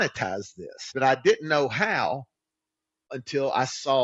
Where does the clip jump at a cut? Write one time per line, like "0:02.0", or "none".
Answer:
0:00.9
0:03.1